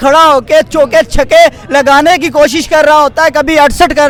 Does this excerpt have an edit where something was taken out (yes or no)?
no